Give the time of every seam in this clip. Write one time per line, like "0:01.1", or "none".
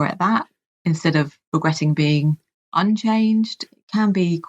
0:03.6